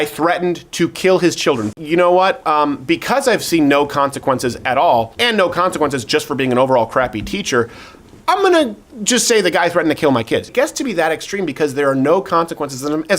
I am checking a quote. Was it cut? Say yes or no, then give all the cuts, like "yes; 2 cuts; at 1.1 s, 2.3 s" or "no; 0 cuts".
yes; 3 cuts; at 1.7 s, 5.1 s, 10.5 s